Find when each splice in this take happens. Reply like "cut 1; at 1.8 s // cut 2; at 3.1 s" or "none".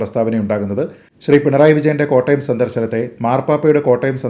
cut 1; at 1.0 s